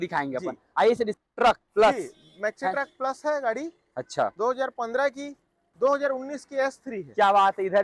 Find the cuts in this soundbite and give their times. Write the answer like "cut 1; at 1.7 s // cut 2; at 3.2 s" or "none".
cut 1; at 1.1 s // cut 2; at 5.7 s

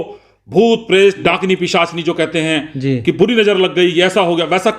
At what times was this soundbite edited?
cut 1; at 1.2 s

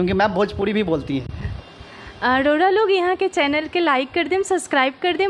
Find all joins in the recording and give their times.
none

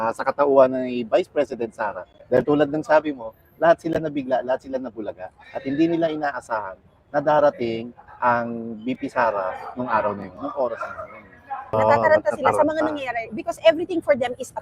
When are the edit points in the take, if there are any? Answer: cut 1; at 11.8 s

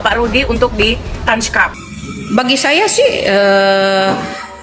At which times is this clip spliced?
cut 1; at 1.8 s

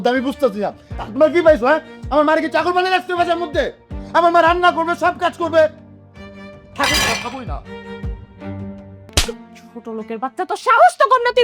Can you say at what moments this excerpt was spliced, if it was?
cut 1; at 9.1 s

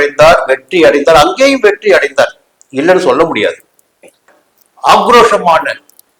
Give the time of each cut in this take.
cut 1; at 4.3 s

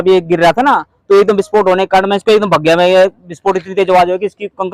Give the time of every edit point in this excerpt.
none

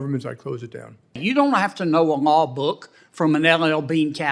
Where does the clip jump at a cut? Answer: cut 1; at 1.2 s

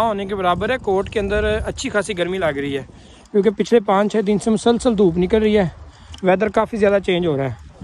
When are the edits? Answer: none

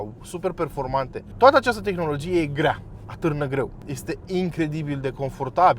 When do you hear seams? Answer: cut 1; at 1.2 s // cut 2; at 3.8 s

